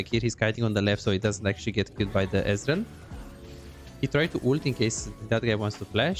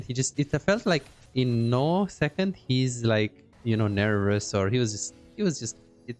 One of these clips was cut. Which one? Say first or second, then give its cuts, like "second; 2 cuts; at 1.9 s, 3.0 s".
second; 1 cut; at 1.2 s